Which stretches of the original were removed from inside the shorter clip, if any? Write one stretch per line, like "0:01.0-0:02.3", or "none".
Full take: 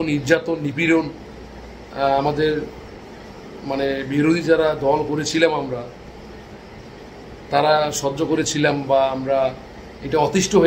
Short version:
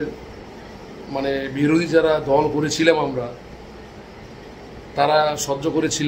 none